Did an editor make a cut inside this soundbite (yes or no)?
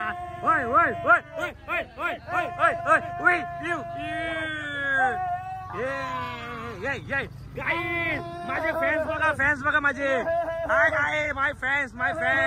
no